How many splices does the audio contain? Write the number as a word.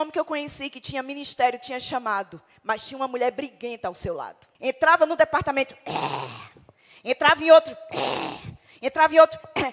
one